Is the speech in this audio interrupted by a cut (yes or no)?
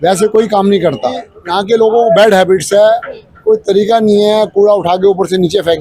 yes